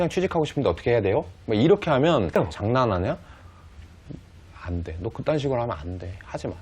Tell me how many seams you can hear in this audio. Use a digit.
1